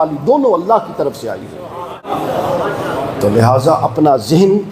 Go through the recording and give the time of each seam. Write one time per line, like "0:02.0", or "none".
0:02.0